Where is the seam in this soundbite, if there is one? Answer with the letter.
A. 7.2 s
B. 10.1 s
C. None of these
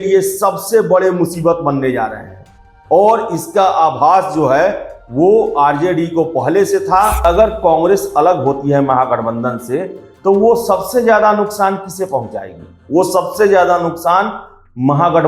A